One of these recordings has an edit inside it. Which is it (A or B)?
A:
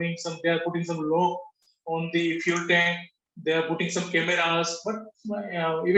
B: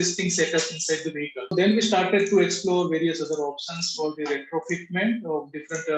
B